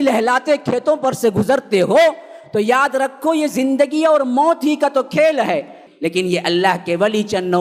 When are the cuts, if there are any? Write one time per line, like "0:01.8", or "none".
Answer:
0:05.8

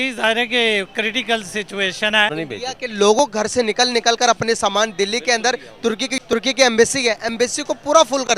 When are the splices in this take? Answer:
0:02.3

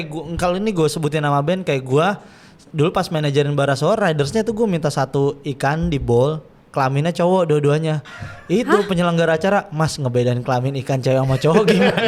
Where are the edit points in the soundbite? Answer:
none

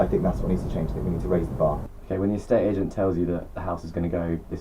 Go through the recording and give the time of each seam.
none

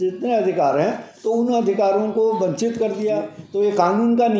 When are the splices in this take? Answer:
0:03.4

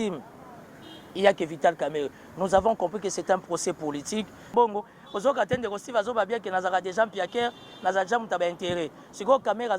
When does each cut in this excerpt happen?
0:04.5

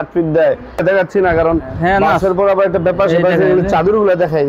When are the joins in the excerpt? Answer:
0:01.0

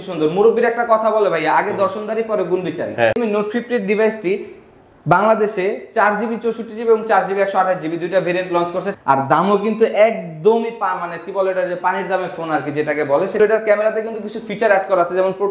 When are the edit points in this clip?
0:03.2
0:08.9
0:13.4

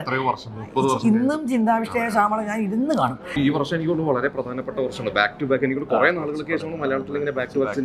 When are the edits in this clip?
0:03.4

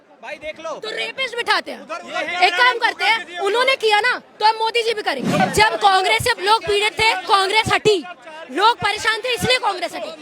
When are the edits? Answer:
0:05.4

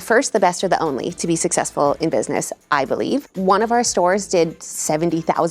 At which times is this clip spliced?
0:03.3

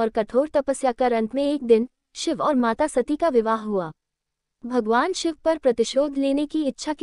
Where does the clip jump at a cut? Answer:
0:04.5

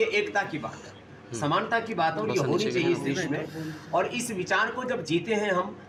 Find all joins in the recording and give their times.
none

